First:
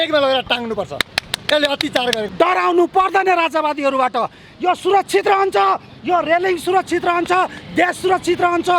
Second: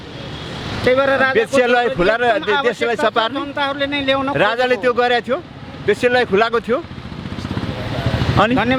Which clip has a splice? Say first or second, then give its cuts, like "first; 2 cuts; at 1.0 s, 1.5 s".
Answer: first; 1 cut; at 2.3 s